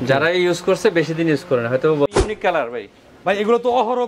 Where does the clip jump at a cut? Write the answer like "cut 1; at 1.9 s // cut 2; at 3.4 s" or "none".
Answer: cut 1; at 2.2 s